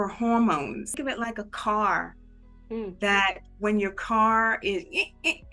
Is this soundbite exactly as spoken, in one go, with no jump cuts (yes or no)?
no